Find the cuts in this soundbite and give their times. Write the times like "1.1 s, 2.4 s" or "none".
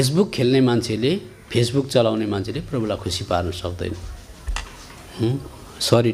none